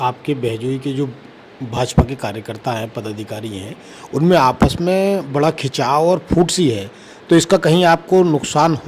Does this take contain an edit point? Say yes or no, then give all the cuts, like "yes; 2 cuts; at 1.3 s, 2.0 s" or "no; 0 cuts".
no; 0 cuts